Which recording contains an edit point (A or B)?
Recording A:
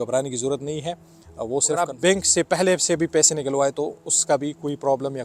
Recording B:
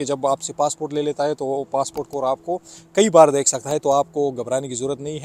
A